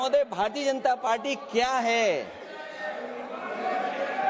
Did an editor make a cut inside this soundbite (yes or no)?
no